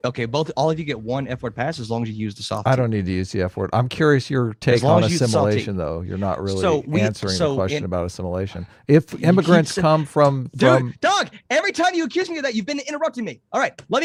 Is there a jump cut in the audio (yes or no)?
no